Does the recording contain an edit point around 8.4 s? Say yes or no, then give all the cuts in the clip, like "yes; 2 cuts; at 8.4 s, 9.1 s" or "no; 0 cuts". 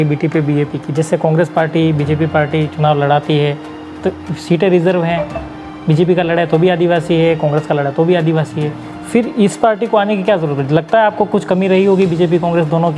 no; 0 cuts